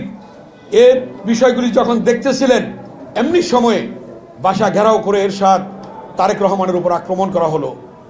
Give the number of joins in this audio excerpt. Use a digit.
0